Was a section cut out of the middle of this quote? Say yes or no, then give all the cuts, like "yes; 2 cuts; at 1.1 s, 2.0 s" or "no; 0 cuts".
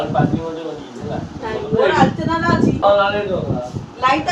yes; 1 cut; at 2.8 s